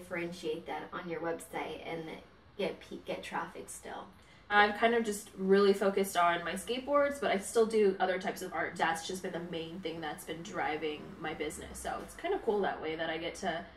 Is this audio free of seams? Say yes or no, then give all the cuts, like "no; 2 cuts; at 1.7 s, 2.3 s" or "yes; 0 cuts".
no; 2 cuts; at 4.5 s, 8.7 s